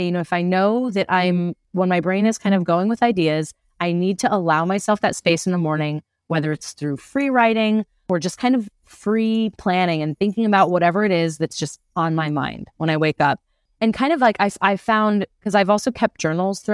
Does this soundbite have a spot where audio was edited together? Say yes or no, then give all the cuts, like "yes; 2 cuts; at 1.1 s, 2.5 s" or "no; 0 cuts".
no; 0 cuts